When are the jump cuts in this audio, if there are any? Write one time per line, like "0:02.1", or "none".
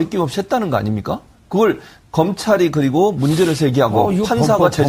0:02.7